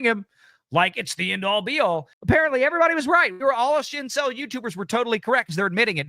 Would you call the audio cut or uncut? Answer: cut